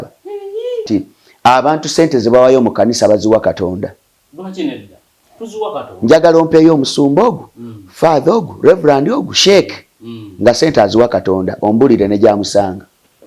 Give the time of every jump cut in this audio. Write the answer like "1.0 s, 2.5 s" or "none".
1.0 s